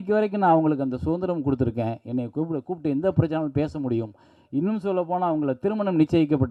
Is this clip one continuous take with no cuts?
yes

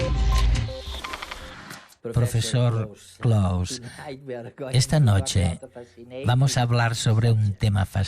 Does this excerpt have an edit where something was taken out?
yes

